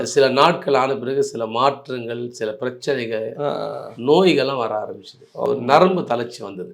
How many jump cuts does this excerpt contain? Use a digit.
1